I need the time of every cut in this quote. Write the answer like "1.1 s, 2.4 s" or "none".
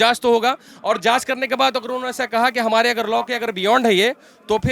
none